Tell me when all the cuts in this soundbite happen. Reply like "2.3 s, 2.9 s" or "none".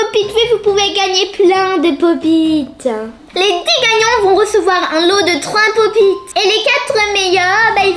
3.2 s, 6.2 s

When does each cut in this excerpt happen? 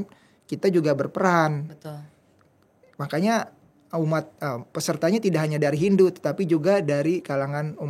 none

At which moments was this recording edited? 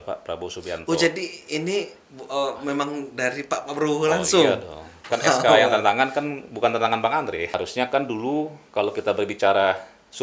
7.6 s

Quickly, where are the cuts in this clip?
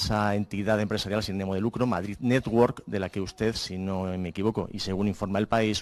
none

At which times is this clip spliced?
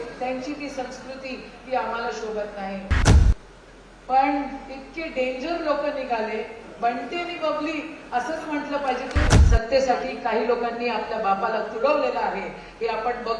3.1 s, 9.3 s

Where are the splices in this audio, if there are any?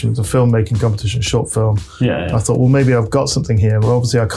none

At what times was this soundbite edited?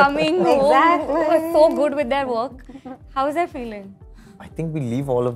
none

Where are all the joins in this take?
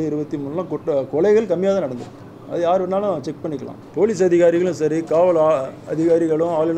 3.8 s

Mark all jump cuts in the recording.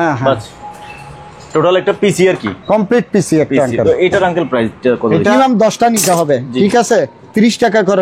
5.3 s

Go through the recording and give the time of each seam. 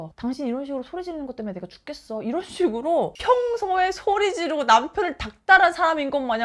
3.1 s

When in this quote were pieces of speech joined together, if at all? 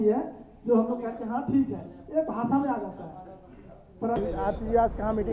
4.2 s

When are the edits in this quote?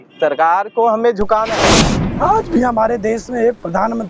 1.7 s

